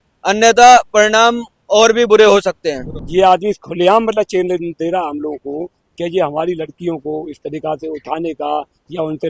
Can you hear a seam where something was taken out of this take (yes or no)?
yes